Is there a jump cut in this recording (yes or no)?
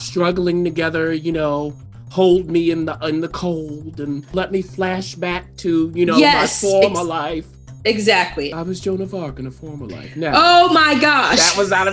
yes